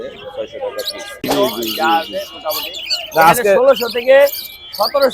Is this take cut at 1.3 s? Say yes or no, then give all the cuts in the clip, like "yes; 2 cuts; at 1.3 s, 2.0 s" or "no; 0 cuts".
yes; 1 cut; at 1.3 s